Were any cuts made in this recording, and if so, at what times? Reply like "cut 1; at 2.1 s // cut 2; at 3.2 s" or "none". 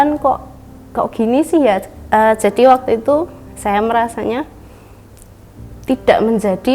none